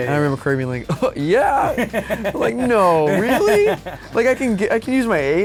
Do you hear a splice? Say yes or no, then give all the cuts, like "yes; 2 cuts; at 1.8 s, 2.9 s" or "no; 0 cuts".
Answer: no; 0 cuts